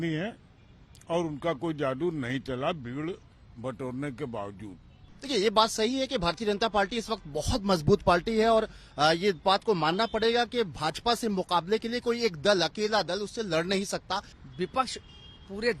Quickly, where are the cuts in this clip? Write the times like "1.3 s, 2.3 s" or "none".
5.1 s, 14.3 s